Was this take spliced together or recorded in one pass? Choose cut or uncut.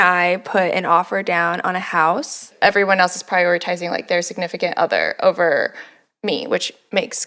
cut